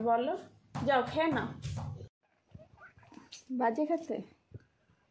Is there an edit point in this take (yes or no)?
yes